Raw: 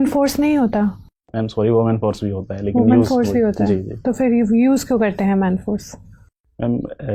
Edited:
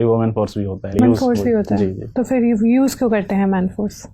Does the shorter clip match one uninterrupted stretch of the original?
no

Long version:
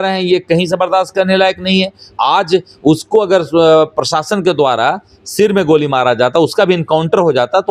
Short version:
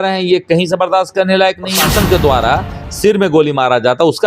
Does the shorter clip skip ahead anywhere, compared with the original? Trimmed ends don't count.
yes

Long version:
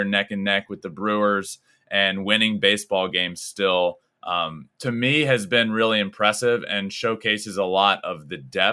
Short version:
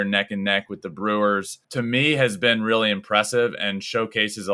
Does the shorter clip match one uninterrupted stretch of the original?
no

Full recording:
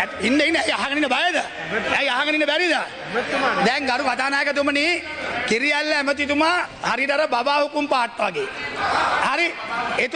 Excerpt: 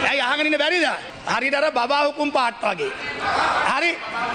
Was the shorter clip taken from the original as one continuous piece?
no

